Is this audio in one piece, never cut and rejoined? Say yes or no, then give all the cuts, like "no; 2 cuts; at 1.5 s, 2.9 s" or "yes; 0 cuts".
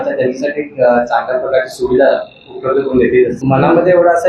no; 1 cut; at 3.4 s